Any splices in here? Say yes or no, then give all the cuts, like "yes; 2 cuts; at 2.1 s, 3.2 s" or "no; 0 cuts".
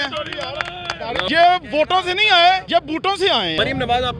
yes; 2 cuts; at 1.2 s, 3.1 s